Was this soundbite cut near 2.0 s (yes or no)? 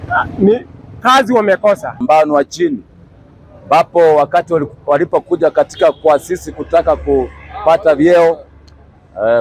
yes